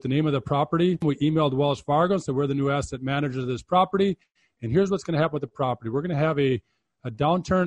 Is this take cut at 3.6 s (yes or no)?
no